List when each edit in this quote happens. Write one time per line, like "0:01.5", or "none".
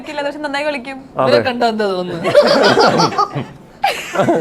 none